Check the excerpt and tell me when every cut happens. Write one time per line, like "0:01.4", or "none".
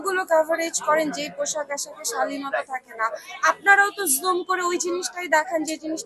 none